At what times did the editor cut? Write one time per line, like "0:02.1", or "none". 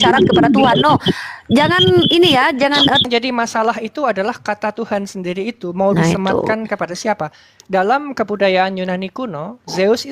0:03.0